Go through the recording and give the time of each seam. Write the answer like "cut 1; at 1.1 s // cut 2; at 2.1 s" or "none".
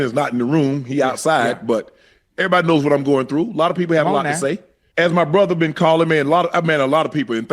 cut 1; at 4.7 s